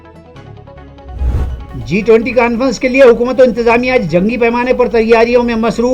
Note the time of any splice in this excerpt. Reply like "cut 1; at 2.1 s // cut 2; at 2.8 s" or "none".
cut 1; at 1.4 s